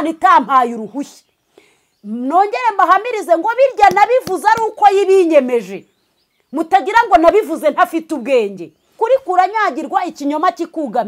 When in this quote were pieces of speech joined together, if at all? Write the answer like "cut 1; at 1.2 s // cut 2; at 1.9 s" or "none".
cut 1; at 9.0 s